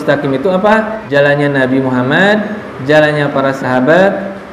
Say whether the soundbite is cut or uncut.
cut